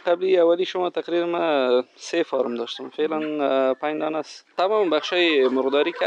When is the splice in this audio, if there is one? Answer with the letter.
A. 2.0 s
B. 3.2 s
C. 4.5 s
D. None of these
C